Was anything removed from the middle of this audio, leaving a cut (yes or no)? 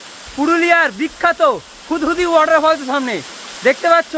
no